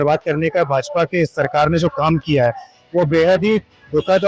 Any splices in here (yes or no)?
no